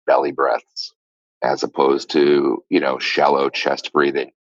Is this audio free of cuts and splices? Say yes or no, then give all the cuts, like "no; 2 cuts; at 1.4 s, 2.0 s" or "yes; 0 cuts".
yes; 0 cuts